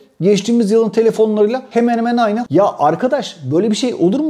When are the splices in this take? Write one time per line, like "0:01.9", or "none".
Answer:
0:02.4